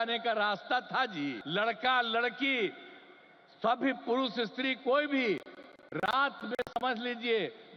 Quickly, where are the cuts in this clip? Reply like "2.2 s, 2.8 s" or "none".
1.4 s

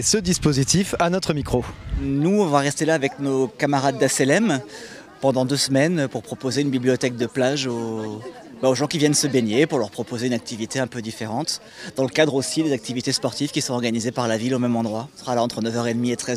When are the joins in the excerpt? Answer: none

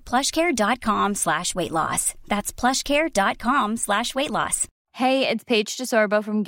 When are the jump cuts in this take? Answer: 4.8 s

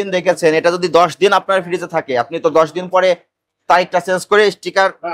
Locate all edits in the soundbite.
none

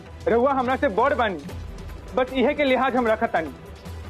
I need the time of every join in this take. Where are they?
none

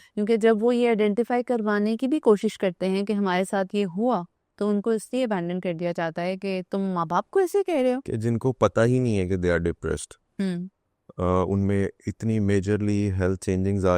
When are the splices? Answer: 8.1 s

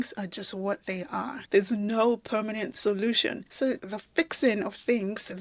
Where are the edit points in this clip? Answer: 3.5 s

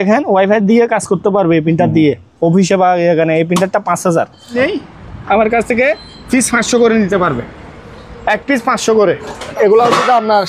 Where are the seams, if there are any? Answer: 4.6 s, 9.5 s

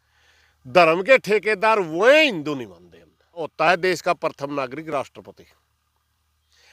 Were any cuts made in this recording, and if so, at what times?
3.5 s

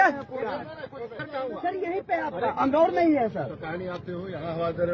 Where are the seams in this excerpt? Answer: 1.3 s

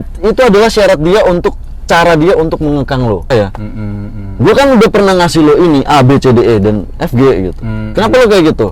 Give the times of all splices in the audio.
3.3 s

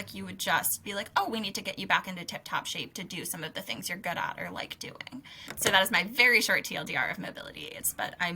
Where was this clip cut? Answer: 5.2 s

